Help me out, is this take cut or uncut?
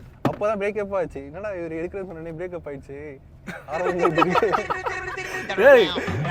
uncut